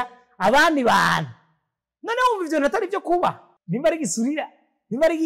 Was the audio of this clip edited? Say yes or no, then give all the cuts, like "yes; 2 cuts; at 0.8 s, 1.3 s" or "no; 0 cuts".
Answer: yes; 1 cut; at 3.5 s